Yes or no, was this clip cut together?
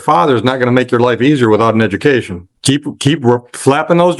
yes